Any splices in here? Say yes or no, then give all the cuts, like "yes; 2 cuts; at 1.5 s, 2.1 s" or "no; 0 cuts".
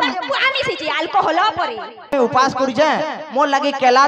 yes; 1 cut; at 2.1 s